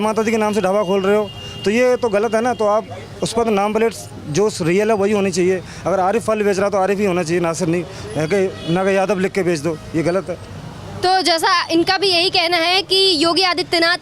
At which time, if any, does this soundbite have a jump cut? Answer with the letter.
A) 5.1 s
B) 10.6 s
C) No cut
C